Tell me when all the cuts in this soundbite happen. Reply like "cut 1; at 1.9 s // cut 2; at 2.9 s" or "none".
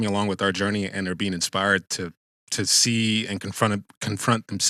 none